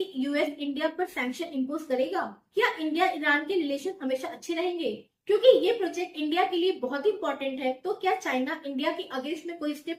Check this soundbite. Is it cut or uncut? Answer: uncut